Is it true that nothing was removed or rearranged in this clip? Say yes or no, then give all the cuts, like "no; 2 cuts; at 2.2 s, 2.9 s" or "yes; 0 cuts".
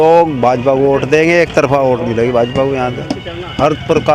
yes; 0 cuts